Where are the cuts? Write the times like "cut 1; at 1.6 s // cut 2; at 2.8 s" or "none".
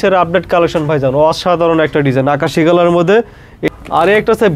cut 1; at 3.6 s